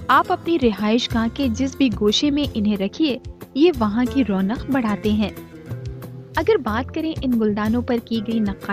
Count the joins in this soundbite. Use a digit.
0